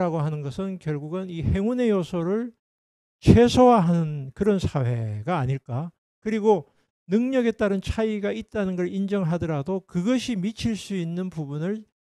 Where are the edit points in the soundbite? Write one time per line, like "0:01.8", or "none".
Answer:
none